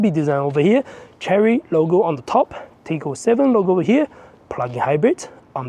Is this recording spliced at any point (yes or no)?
no